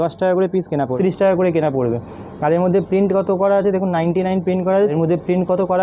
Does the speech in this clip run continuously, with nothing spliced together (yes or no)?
no